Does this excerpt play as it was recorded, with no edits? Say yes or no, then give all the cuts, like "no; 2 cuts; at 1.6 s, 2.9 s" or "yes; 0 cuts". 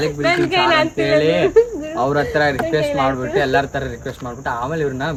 yes; 0 cuts